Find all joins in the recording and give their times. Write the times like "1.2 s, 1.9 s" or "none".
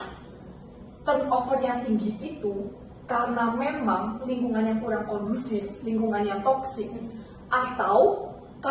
none